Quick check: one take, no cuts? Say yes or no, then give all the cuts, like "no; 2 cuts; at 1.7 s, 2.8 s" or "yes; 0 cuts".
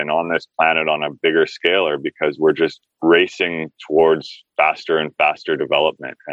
yes; 0 cuts